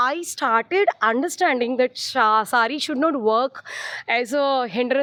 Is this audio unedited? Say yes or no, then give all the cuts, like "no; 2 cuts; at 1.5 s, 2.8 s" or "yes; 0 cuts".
yes; 0 cuts